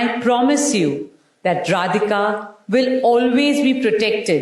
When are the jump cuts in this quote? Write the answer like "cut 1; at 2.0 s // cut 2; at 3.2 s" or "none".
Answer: none